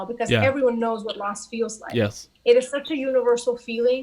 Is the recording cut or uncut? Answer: cut